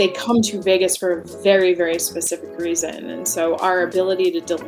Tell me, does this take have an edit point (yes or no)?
no